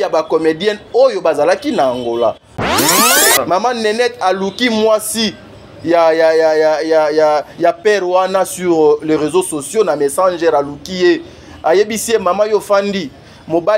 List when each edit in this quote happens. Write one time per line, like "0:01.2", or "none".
0:03.0

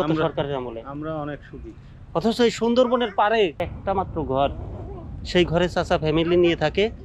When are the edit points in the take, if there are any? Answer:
0:03.7

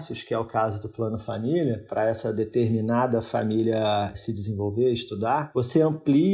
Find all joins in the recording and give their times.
0:04.2
0:05.5

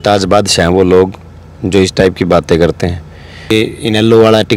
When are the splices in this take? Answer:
0:03.5

